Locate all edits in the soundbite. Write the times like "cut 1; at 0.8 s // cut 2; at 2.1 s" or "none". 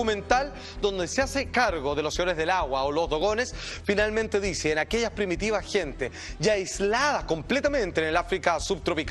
none